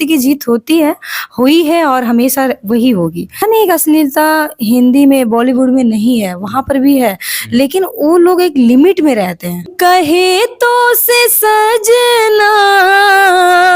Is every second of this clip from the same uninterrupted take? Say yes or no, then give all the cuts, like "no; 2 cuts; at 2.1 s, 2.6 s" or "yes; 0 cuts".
no; 2 cuts; at 3.4 s, 9.7 s